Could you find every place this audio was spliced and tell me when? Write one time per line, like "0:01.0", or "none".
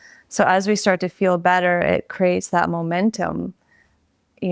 none